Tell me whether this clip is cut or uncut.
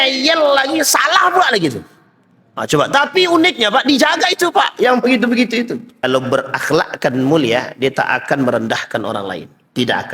cut